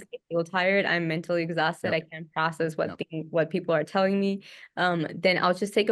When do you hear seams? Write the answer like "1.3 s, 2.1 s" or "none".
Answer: none